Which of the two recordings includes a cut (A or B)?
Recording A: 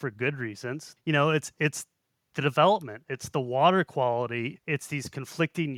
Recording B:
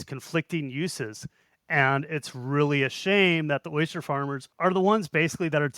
B